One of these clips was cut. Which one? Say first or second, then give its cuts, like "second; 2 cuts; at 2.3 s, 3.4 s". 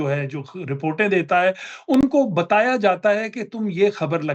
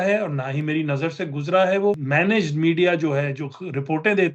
second; 1 cut; at 2.0 s